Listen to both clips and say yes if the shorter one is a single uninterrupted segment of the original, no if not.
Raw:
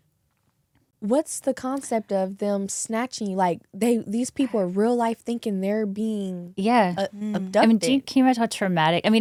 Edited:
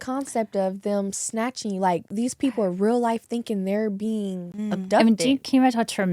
no